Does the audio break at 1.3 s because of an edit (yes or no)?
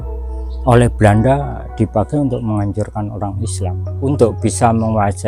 no